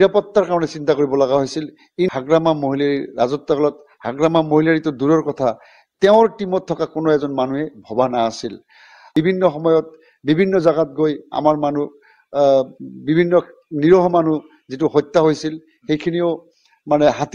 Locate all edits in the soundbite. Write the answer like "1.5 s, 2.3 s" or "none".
2.1 s, 9.0 s